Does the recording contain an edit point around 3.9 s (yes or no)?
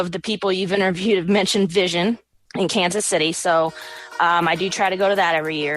no